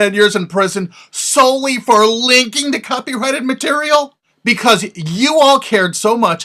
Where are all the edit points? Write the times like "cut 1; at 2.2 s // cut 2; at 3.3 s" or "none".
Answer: none